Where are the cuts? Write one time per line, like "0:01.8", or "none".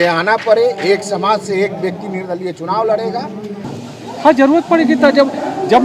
0:03.7